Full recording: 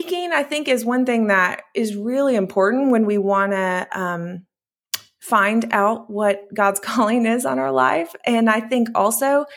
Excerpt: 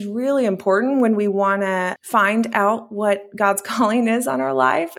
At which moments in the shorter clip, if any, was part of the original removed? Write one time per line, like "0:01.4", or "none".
0:02.0